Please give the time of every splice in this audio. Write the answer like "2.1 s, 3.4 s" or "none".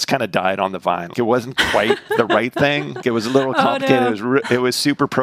1.1 s, 3.0 s